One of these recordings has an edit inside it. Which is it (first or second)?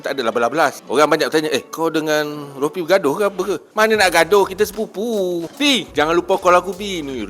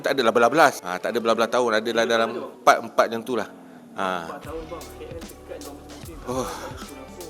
first